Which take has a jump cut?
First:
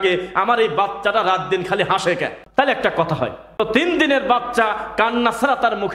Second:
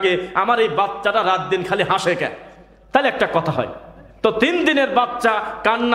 first; 2 cuts; at 2.4 s, 3.6 s

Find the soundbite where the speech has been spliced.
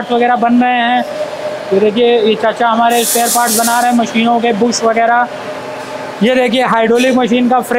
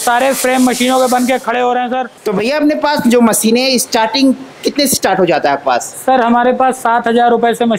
second; 1 cut; at 2.1 s

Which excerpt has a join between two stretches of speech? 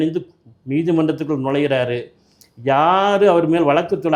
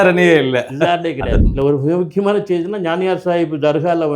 second; 1 cut; at 1.4 s

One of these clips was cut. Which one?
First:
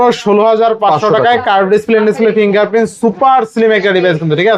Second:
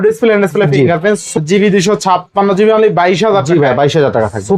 second; 1 cut; at 1.3 s

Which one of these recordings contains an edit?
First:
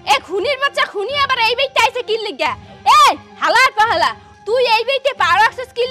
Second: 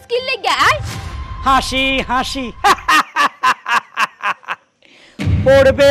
second; 1 cut; at 1.2 s

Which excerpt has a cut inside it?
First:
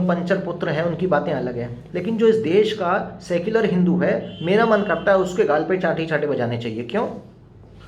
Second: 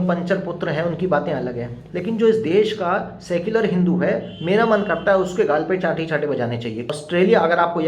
second; 1 cut; at 6.9 s

